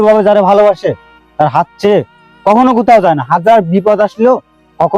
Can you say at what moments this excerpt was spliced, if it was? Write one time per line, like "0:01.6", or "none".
none